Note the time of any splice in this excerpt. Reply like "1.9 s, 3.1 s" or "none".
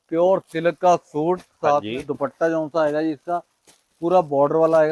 none